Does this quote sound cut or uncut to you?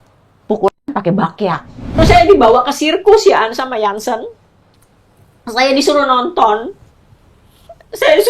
cut